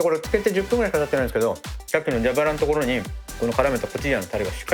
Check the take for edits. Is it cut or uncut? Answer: cut